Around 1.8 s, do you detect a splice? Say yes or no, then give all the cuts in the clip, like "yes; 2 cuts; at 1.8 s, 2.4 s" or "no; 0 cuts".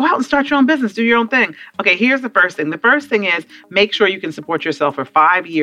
no; 0 cuts